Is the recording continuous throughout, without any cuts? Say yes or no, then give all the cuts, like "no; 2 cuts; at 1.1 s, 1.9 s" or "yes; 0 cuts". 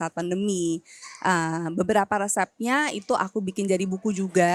yes; 0 cuts